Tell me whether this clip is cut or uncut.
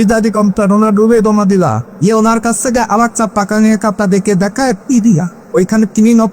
cut